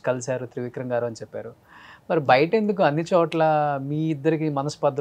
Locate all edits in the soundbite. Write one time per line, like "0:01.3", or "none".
none

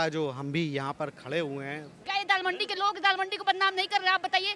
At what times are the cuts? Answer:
0:01.9

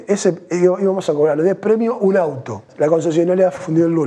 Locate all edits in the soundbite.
0:02.6

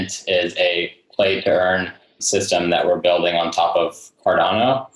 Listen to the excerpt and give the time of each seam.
0:02.2

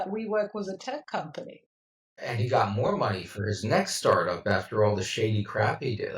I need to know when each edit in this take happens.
none

